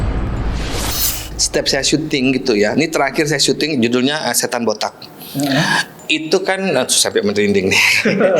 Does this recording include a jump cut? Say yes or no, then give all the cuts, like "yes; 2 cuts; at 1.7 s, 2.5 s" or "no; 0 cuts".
yes; 1 cut; at 1.3 s